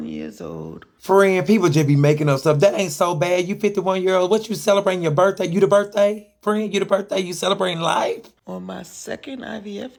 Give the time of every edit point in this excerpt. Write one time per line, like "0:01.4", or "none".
none